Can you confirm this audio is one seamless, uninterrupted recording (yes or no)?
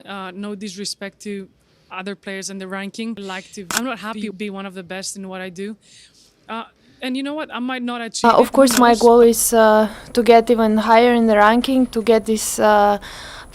no